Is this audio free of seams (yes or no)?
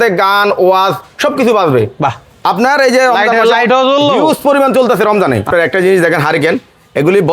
no